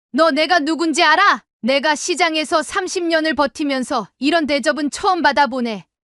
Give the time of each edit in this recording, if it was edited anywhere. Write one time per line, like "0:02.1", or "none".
0:01.5